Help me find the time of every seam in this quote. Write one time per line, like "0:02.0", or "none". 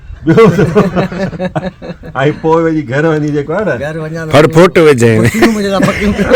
none